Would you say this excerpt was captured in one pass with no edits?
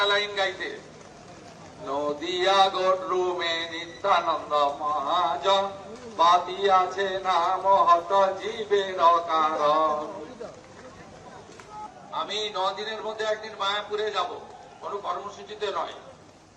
no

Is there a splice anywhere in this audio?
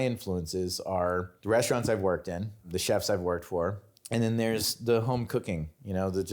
yes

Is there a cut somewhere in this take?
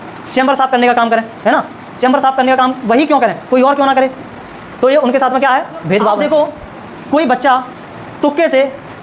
yes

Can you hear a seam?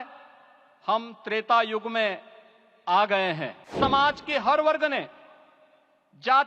yes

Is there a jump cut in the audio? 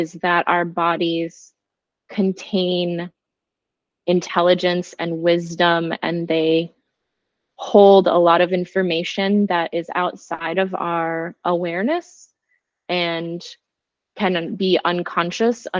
no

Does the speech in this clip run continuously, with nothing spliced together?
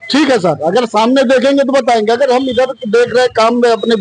yes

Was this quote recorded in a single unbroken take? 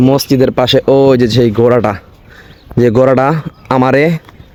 yes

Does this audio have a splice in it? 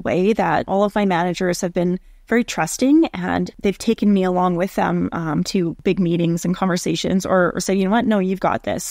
no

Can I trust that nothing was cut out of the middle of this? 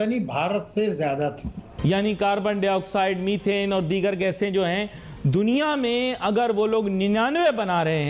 no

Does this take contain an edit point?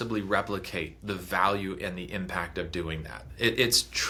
no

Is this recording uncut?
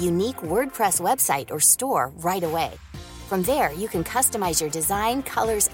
yes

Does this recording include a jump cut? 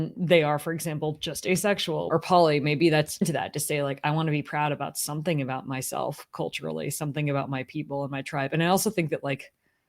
yes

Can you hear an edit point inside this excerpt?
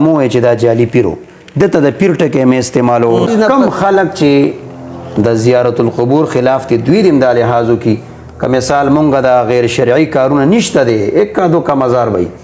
yes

